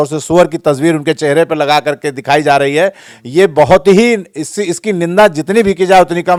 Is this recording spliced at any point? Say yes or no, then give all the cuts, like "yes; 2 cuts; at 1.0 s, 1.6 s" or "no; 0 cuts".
no; 0 cuts